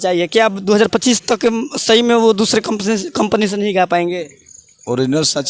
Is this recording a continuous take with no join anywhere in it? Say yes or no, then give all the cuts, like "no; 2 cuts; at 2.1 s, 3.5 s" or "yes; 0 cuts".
yes; 0 cuts